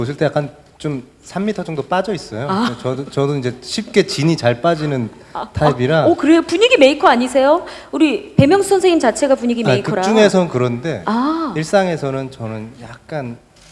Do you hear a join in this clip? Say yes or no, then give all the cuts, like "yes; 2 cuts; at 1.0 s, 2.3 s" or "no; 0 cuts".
no; 0 cuts